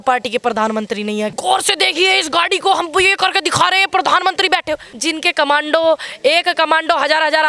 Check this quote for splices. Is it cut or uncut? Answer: cut